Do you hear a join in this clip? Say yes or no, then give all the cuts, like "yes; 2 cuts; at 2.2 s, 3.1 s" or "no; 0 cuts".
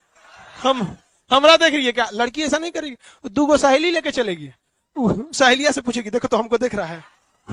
no; 0 cuts